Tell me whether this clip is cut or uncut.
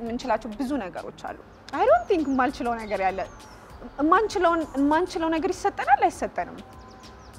cut